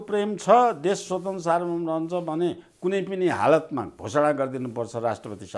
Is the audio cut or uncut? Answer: uncut